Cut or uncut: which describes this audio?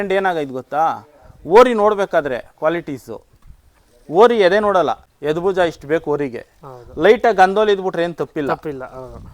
cut